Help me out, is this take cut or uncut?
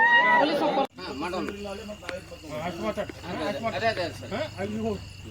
cut